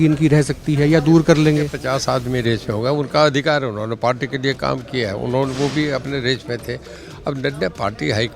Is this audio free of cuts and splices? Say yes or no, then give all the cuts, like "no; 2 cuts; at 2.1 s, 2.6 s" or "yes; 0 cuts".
no; 1 cut; at 1.8 s